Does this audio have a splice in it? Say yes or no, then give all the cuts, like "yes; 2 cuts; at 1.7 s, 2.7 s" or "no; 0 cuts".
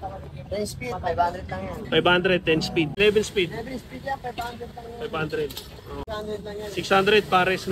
yes; 2 cuts; at 2.9 s, 6.0 s